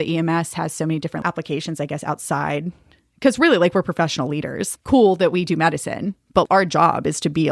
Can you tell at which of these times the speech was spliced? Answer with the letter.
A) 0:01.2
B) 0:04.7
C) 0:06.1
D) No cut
A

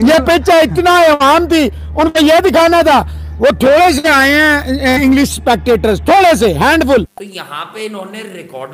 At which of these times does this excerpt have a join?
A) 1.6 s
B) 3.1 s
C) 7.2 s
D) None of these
C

